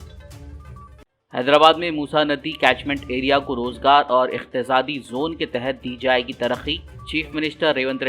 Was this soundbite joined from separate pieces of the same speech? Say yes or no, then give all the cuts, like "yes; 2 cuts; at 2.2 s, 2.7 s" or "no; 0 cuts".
no; 0 cuts